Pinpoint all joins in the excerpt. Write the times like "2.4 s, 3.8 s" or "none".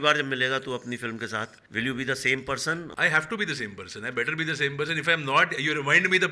1.6 s, 2.9 s